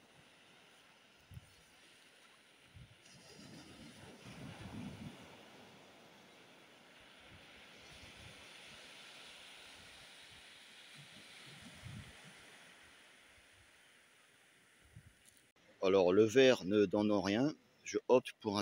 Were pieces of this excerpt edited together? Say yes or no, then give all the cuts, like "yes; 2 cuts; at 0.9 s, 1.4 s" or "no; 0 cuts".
no; 0 cuts